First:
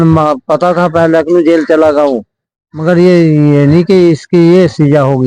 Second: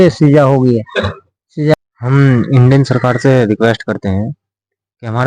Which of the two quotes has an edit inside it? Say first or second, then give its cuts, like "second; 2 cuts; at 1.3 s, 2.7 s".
second; 1 cut; at 1.7 s